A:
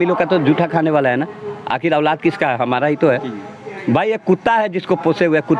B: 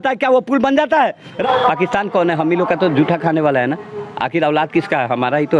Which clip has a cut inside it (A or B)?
B